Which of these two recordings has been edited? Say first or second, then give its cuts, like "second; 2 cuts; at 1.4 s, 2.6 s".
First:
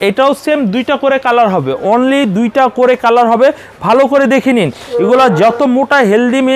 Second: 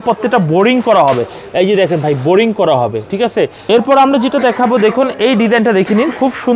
second; 1 cut; at 3.6 s